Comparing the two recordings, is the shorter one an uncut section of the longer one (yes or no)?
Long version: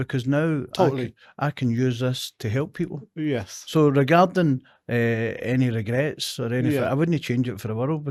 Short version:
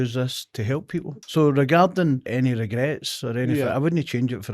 no